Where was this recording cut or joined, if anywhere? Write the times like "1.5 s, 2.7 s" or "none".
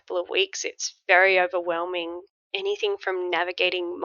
2.2 s